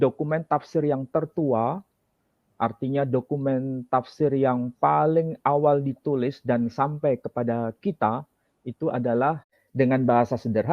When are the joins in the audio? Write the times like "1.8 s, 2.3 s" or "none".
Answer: 9.6 s